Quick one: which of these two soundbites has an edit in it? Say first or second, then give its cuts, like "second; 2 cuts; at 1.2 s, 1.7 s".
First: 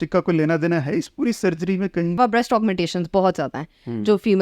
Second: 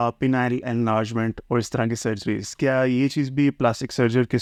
first; 1 cut; at 2.2 s